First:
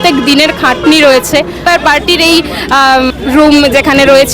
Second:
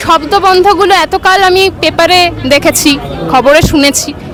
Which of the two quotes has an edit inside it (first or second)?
first